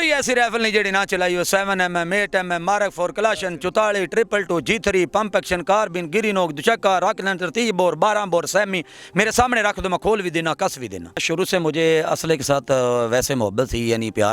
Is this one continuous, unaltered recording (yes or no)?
no